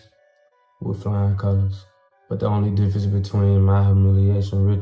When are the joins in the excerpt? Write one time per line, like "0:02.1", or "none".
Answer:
0:02.0